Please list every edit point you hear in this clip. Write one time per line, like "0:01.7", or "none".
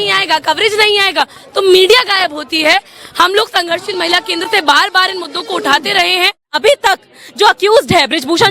0:06.5